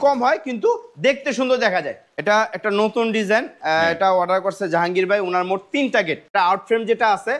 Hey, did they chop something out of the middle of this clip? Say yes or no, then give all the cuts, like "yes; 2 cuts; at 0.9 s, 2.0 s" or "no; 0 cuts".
yes; 2 cuts; at 2.1 s, 6.3 s